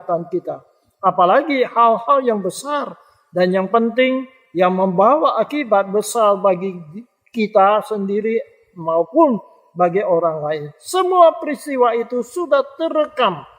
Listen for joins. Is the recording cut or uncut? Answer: uncut